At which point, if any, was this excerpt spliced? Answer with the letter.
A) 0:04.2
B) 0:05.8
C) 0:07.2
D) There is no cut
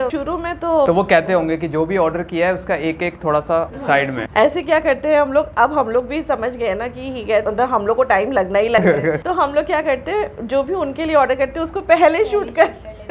D